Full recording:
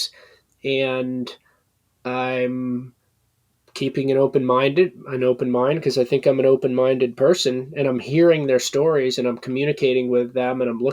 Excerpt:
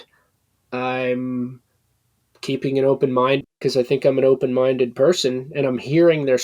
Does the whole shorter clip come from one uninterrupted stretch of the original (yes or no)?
no